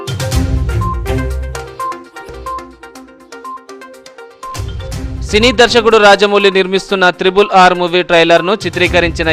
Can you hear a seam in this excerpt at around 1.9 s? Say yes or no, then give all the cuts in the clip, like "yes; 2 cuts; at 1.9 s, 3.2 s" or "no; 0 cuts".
no; 0 cuts